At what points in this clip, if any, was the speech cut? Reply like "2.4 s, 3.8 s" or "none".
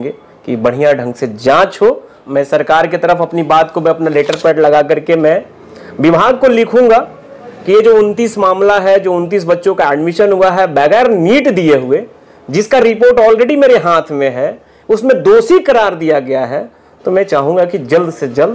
2.1 s